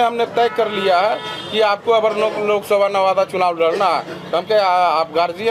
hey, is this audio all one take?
yes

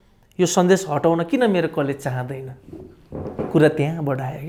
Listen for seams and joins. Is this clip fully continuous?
yes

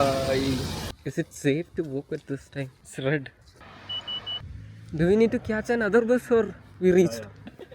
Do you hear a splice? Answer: yes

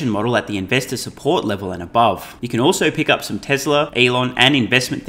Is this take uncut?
no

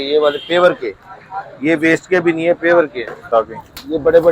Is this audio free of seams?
no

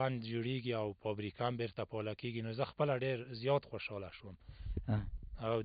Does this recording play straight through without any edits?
yes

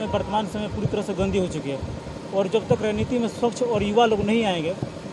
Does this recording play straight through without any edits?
yes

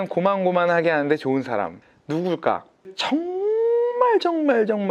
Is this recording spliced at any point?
yes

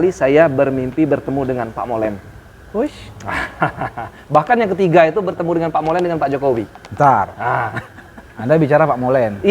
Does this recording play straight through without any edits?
yes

